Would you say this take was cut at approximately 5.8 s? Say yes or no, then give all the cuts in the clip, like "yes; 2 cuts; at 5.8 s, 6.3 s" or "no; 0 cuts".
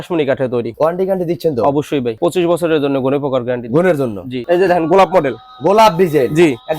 no; 3 cuts; at 0.7 s, 2.2 s, 4.4 s